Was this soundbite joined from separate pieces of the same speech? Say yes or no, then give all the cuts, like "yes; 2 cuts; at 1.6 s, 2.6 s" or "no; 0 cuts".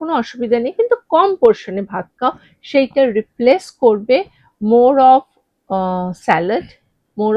no; 0 cuts